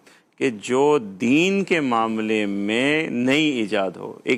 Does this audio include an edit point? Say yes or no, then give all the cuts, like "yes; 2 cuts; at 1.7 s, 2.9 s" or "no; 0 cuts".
no; 0 cuts